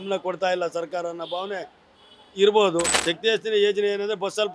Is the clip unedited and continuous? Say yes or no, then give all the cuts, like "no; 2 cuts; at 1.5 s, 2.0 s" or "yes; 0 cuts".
no; 1 cut; at 3.0 s